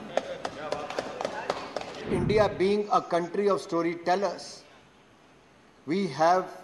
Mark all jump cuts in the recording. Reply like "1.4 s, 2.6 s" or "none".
2.0 s